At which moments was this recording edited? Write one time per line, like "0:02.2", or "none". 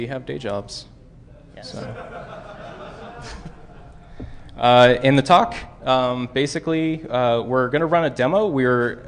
0:01.3